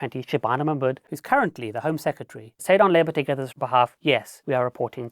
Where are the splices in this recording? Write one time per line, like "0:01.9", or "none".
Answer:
0:01.0
0:02.5
0:04.1